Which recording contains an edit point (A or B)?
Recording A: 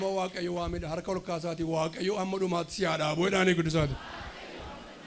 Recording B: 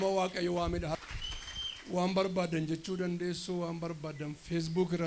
B